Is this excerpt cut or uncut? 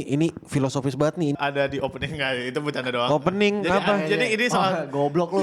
cut